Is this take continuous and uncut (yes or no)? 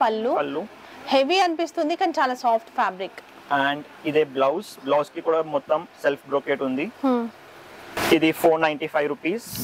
yes